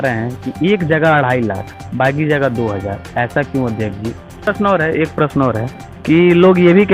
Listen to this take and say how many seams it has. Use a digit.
1